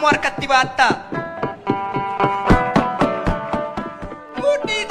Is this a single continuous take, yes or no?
no